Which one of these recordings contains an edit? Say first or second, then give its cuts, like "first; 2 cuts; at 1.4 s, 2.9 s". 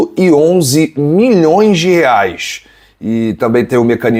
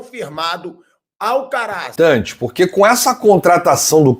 second; 1 cut; at 1.9 s